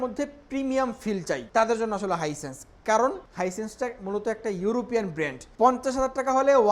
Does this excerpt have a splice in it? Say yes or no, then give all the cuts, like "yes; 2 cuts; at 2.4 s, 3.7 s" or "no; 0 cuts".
yes; 3 cuts; at 1.4 s, 3.2 s, 5.4 s